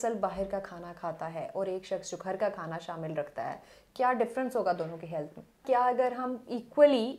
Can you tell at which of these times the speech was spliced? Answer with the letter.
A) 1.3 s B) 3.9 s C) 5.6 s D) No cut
C